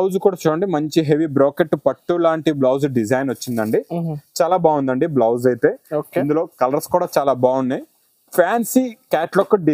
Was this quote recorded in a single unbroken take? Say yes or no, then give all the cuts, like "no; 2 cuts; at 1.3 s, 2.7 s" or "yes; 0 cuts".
yes; 0 cuts